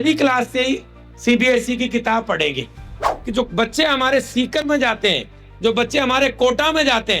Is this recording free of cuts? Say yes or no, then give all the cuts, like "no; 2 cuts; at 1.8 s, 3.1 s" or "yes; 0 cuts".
no; 1 cut; at 3.1 s